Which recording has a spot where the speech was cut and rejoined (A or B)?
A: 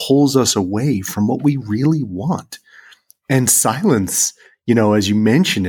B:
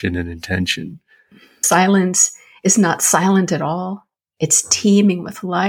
B